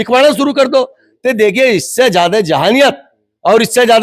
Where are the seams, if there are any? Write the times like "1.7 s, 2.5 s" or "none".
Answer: none